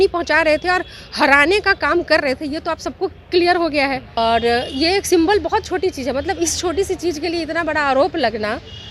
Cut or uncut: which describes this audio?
cut